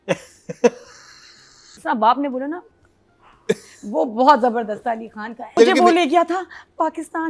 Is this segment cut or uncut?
cut